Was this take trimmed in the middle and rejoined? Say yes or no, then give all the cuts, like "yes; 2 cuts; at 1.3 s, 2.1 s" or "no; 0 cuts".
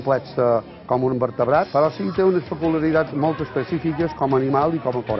yes; 1 cut; at 1.7 s